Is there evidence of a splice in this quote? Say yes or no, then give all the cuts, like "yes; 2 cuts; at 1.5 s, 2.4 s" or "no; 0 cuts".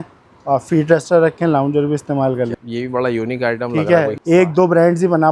yes; 2 cuts; at 2.6 s, 4.1 s